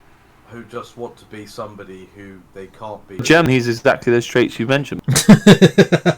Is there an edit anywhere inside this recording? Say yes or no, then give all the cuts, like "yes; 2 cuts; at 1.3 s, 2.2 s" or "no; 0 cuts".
yes; 2 cuts; at 3.5 s, 5.0 s